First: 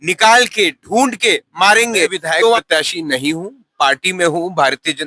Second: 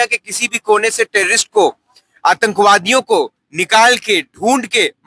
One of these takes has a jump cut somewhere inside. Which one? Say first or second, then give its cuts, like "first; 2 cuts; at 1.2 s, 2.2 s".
first; 1 cut; at 2.6 s